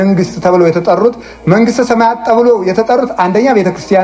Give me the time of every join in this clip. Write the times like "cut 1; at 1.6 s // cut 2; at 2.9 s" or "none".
cut 1; at 1.3 s